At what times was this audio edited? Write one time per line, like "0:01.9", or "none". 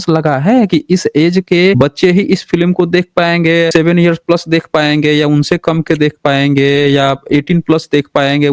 0:01.8
0:03.7